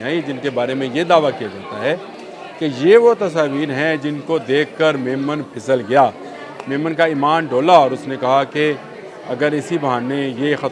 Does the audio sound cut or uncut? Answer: uncut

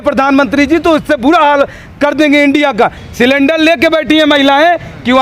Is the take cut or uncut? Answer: cut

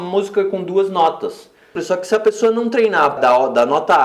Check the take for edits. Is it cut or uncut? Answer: cut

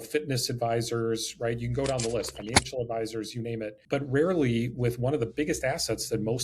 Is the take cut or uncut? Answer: cut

